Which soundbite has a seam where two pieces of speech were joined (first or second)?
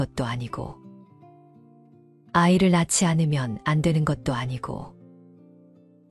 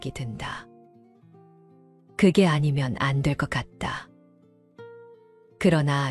first